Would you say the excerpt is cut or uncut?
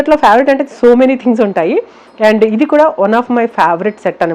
uncut